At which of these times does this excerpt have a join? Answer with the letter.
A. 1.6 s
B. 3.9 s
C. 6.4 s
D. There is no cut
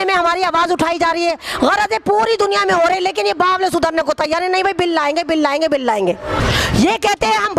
C